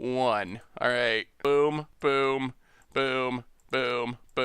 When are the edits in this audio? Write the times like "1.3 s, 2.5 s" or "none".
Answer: 1.3 s, 1.9 s